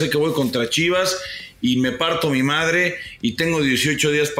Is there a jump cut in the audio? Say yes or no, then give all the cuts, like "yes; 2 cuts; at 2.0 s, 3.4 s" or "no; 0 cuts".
no; 0 cuts